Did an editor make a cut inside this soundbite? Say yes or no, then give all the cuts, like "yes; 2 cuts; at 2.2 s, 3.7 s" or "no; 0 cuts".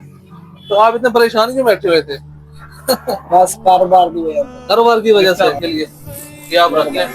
yes; 1 cut; at 5.4 s